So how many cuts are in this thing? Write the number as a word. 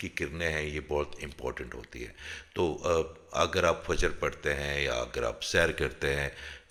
zero